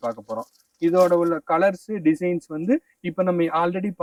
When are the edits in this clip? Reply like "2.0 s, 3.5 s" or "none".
none